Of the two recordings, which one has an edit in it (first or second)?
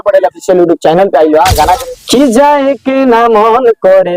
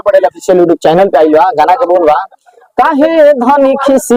first